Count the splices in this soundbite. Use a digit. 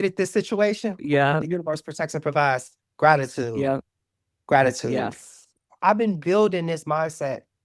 1